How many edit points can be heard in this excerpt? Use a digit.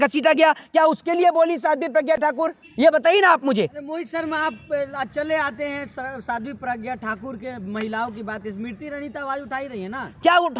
0